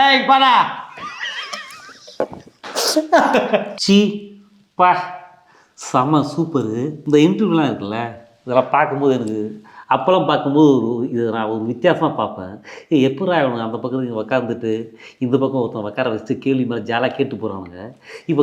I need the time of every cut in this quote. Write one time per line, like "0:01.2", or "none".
0:03.7
0:07.0

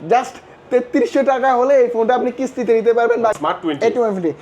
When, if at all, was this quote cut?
0:03.3

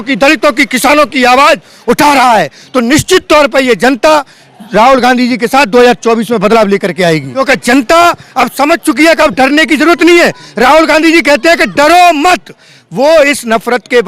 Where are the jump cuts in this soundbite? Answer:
0:07.3

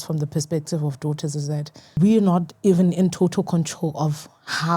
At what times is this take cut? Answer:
0:02.0

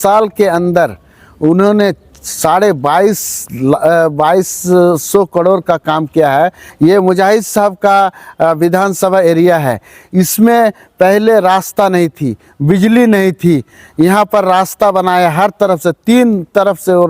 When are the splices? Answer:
0:06.6

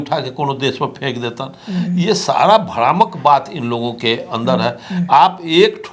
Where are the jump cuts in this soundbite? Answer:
none

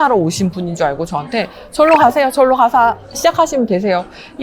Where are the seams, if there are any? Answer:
none

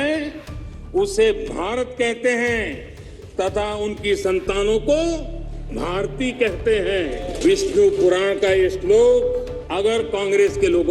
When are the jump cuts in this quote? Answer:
0:07.4
0:09.6

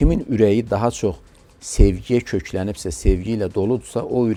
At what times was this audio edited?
none

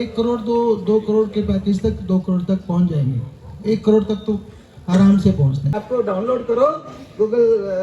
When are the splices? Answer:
0:05.7

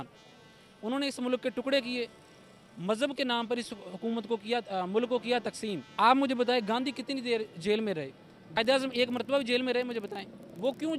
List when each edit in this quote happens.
0:05.9
0:08.6

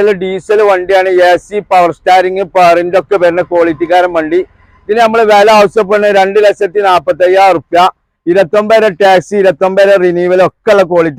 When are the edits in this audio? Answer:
none

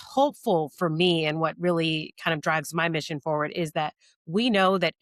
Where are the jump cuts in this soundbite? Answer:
none

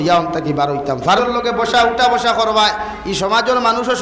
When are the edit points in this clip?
0:01.2

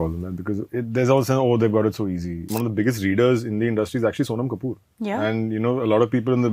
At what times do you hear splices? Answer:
0:02.5

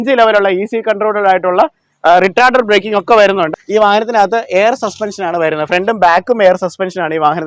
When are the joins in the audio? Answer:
0:03.5

